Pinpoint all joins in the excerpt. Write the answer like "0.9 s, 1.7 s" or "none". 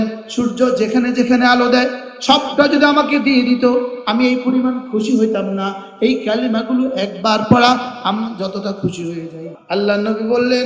9.5 s